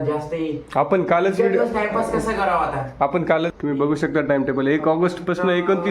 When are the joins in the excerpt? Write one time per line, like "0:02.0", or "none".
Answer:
0:03.5